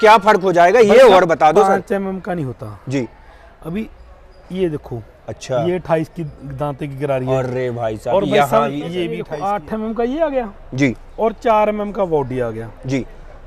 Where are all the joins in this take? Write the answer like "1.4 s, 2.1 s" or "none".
9.2 s